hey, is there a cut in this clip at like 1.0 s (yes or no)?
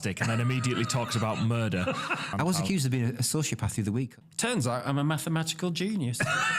no